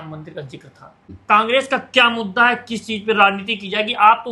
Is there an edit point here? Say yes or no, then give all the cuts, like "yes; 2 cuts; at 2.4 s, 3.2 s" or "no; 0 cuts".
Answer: yes; 1 cut; at 1.1 s